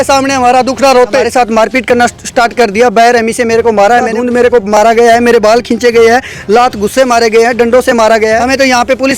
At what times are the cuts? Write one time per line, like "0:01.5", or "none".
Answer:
0:01.3
0:04.2
0:08.4